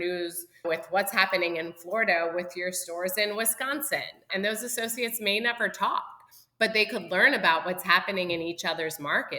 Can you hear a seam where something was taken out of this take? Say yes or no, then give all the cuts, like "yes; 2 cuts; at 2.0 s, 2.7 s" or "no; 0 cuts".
yes; 1 cut; at 4.3 s